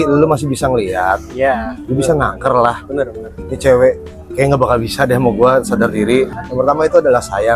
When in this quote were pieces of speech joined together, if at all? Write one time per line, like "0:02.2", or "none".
0:06.3